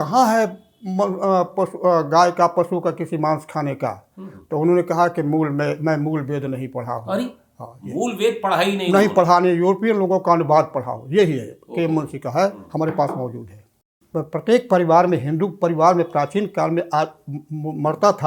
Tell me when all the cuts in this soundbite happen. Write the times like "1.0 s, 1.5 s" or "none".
14.0 s